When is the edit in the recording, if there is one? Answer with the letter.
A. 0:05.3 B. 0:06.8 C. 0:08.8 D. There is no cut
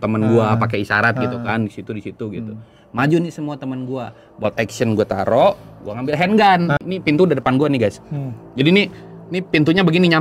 B